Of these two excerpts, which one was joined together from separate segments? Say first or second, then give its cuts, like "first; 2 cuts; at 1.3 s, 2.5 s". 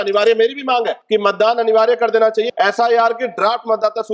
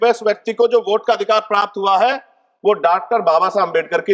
first; 2 cuts; at 1.0 s, 2.5 s